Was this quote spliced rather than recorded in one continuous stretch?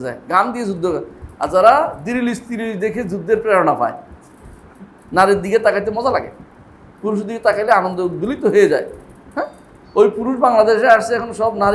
no; 0 cuts

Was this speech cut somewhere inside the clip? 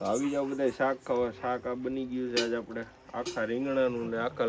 no; 0 cuts

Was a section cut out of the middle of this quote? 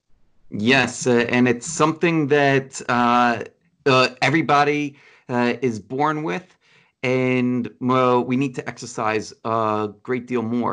no; 0 cuts

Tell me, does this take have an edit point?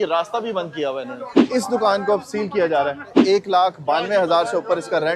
yes; 2 cuts; at 1.4 s, 3.1 s

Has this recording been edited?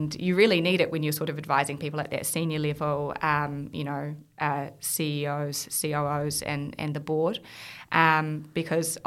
no; 0 cuts

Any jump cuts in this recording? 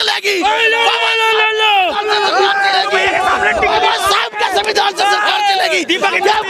no; 0 cuts

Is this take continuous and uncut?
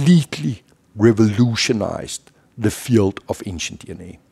yes; 0 cuts

